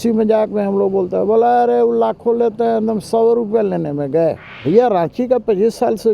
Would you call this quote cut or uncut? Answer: cut